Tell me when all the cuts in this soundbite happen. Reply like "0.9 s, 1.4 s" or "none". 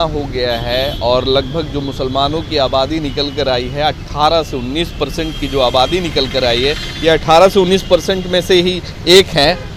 none